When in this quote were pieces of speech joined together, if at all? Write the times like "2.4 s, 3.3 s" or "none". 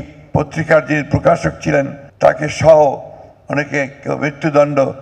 2.0 s